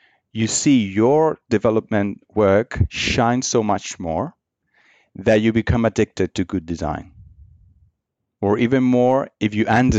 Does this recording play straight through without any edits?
no; 1 cut; at 8.2 s

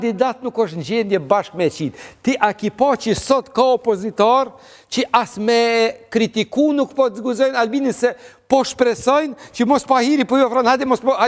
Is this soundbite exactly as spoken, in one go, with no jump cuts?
yes; 0 cuts

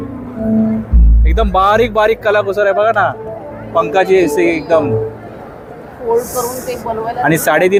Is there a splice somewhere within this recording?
no; 0 cuts

